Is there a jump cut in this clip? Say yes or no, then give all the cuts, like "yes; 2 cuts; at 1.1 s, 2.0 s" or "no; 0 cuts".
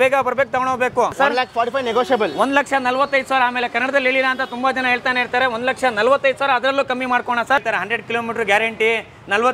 yes; 2 cuts; at 1.1 s, 7.6 s